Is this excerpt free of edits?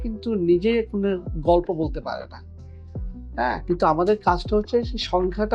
yes; 0 cuts

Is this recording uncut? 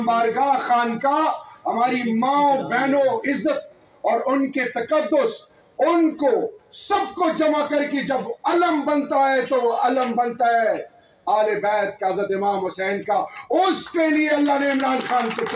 yes; 0 cuts

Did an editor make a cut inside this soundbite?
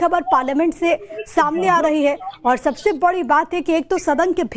yes; 1 cut; at 1.6 s

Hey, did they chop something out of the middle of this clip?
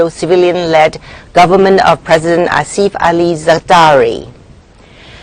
no; 0 cuts

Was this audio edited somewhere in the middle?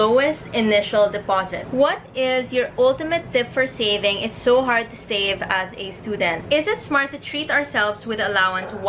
yes; 2 cuts; at 1.6 s, 6.4 s

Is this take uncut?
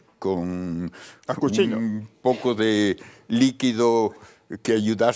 no; 1 cut; at 2.4 s

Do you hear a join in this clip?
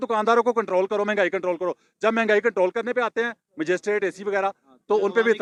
no; 0 cuts

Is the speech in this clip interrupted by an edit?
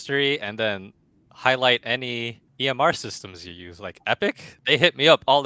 yes; 2 cuts; at 2.4 s, 4.5 s

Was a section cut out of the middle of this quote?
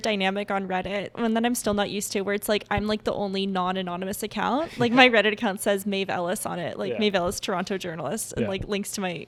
no; 0 cuts

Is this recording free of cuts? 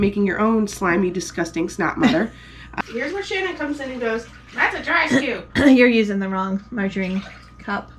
no; 2 cuts; at 2.6 s, 4.4 s

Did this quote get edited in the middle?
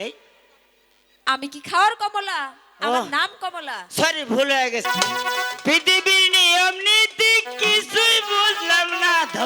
yes; 1 cut; at 4.8 s

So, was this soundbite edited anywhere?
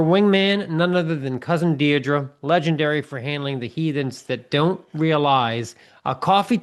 no; 0 cuts

